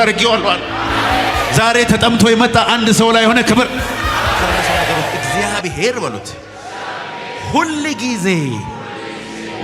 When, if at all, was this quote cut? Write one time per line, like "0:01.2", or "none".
0:05.1